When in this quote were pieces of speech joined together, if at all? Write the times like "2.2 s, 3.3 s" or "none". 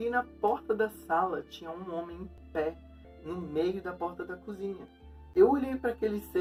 none